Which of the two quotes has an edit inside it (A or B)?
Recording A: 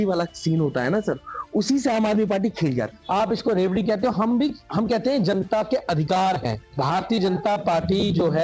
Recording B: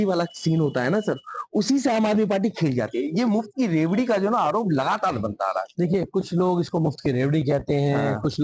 A